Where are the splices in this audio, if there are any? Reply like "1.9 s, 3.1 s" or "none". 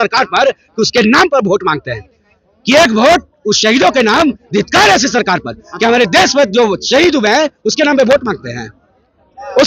none